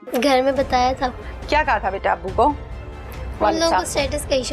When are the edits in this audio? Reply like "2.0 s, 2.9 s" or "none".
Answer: 1.2 s